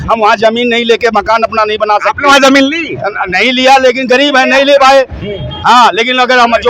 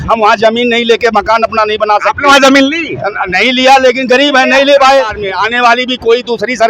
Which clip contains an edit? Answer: second; 1 cut; at 5.2 s

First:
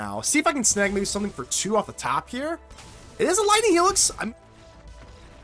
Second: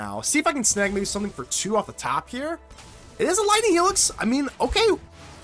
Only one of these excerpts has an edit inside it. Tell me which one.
first; 1 cut; at 4.1 s

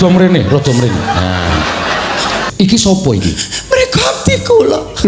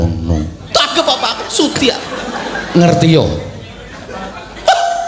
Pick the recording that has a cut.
first; 1 cut; at 2.5 s

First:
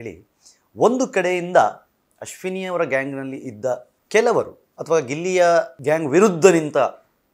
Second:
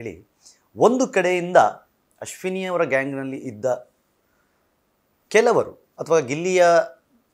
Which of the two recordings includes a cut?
first; 2 cuts; at 3.9 s, 5.7 s

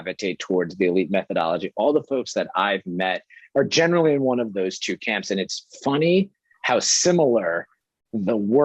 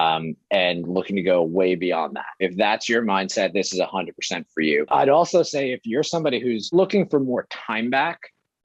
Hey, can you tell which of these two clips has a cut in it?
second; 3 cuts; at 2.4 s, 4.9 s, 6.7 s

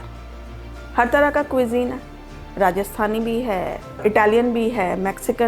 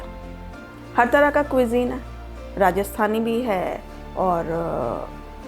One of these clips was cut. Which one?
first; 1 cut; at 4.0 s

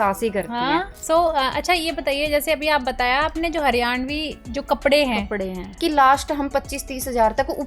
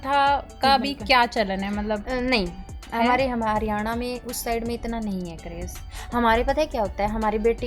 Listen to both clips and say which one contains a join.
first; 2 cuts; at 0.9 s, 5.8 s

